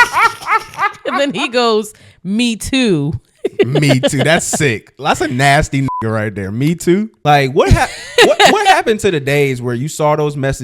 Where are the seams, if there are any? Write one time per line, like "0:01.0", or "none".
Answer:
0:07.1

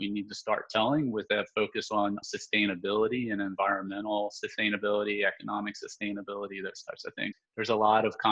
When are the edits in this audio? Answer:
0:02.2
0:07.3

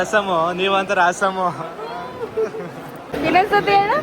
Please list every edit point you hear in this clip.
0:03.0

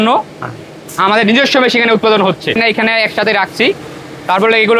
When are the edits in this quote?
0:02.5

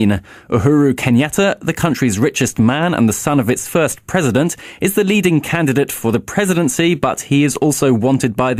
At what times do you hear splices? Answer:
0:06.8

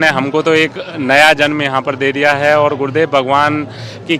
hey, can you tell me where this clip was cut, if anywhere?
none

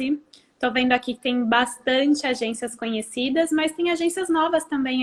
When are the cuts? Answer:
none

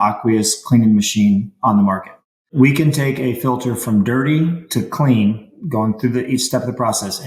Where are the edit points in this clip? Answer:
0:02.5

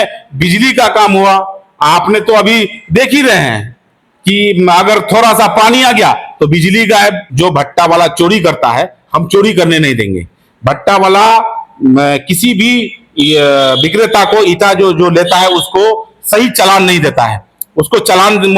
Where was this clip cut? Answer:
0:07.3

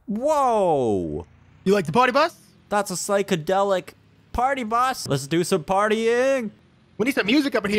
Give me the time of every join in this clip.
0:05.1
0:06.5

